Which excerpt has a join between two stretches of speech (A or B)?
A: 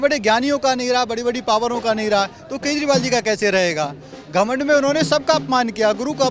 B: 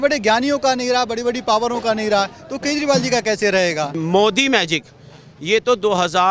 B